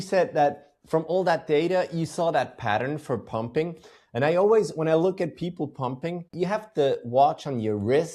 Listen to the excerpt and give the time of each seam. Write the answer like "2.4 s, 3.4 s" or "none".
6.3 s